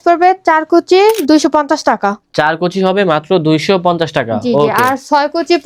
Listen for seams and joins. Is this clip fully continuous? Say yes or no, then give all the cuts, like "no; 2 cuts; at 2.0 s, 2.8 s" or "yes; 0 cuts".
yes; 0 cuts